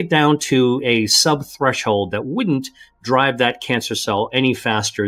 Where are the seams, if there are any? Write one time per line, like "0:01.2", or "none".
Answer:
none

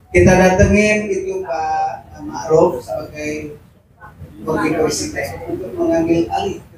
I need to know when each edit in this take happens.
none

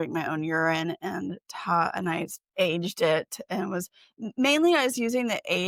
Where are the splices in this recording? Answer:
none

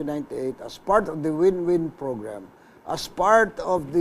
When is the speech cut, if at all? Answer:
none

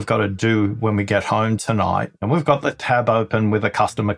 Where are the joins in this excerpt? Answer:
0:02.2

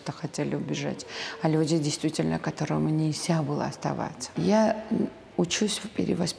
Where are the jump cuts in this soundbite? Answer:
0:04.3

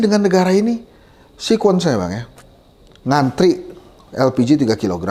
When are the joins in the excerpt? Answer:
none

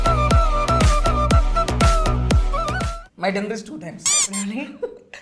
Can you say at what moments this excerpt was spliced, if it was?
0:02.9

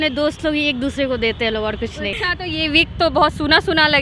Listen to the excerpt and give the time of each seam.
0:02.2

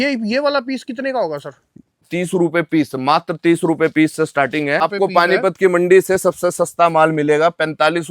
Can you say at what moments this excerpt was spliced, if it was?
0:02.1
0:04.8

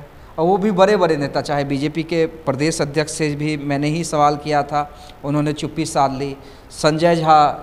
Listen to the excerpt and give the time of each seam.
none

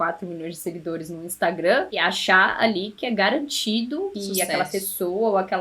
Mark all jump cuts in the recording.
0:01.9
0:04.2

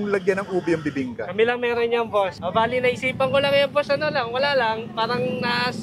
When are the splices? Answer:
none

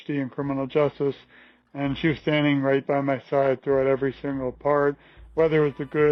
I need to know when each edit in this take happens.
none

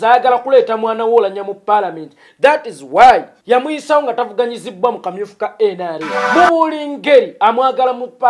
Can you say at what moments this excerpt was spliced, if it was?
0:03.3
0:06.1

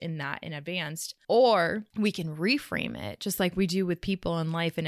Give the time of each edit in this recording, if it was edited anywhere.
0:01.1
0:01.9

